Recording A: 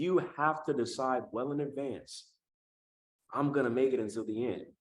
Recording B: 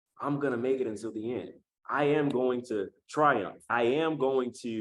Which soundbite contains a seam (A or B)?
B